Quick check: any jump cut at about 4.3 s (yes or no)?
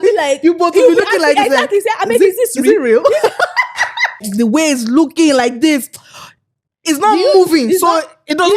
yes